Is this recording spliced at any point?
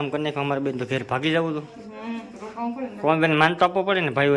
no; 0 cuts

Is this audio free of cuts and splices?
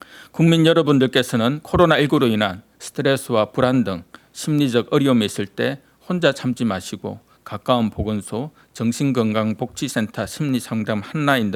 yes; 0 cuts

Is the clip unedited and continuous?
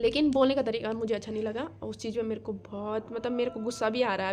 yes; 0 cuts

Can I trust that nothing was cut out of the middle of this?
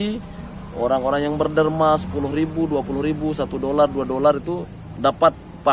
yes; 0 cuts

